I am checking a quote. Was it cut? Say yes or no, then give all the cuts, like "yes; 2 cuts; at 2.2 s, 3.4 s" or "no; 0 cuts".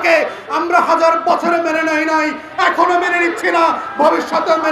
no; 0 cuts